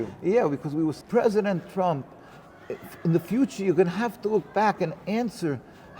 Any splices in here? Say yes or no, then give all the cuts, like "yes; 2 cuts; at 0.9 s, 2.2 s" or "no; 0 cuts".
yes; 1 cut; at 1.0 s